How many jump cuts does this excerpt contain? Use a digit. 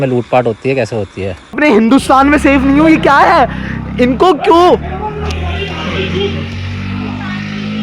1